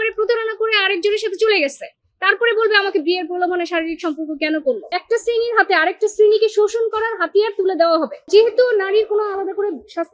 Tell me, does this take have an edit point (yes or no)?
yes